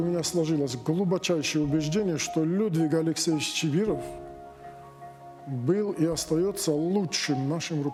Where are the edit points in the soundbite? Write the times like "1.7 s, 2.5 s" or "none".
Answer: none